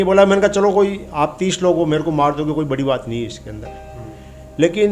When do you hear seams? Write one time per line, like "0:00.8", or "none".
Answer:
none